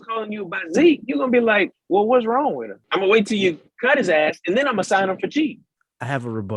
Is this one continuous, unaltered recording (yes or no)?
no